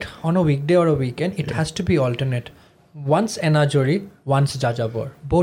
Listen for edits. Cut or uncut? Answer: uncut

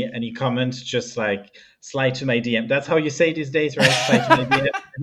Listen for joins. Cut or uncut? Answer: uncut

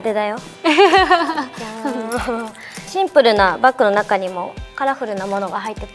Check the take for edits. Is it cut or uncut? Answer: cut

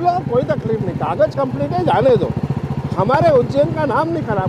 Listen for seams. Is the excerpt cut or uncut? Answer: uncut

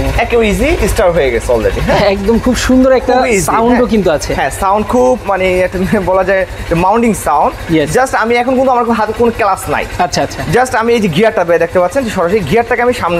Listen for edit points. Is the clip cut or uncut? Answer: uncut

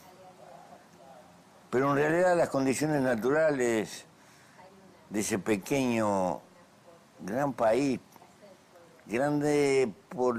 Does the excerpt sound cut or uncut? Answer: cut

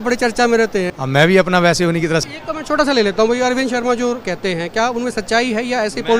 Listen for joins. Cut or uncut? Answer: cut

